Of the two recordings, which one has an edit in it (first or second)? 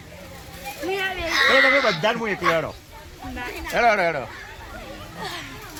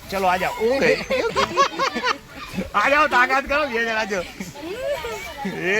second